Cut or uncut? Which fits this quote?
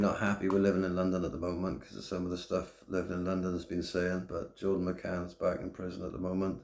uncut